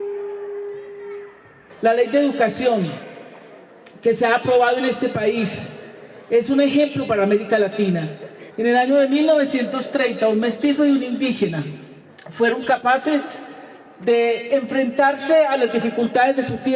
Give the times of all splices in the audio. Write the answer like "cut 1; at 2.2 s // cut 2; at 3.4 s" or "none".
cut 1; at 1.1 s